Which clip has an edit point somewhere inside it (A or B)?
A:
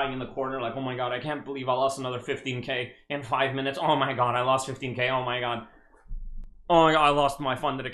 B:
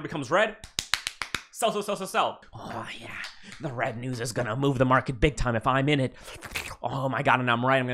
B